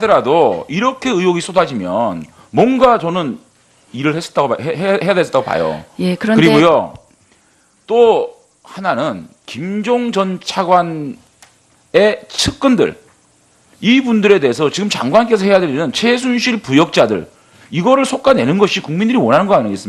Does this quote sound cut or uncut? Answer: cut